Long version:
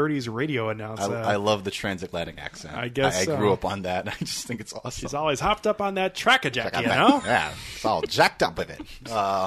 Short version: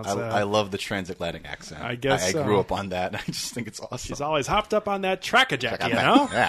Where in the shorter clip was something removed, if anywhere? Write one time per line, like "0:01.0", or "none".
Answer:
none